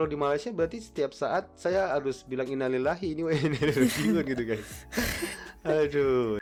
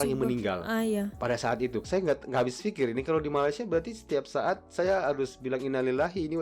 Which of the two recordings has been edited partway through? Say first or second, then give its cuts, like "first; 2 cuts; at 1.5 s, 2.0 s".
second; 1 cut; at 1.9 s